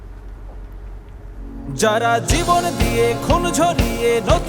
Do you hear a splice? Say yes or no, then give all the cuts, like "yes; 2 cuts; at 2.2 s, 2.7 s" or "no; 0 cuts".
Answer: yes; 1 cut; at 1.6 s